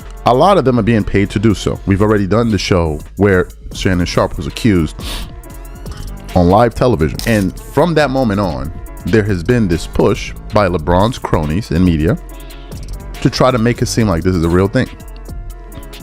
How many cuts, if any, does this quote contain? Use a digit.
1